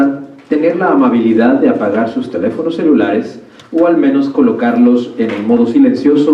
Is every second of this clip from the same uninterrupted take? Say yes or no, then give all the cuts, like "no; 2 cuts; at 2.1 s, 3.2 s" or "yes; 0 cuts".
yes; 0 cuts